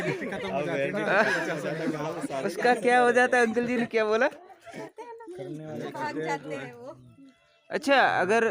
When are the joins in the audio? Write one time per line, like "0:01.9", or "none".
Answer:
0:04.8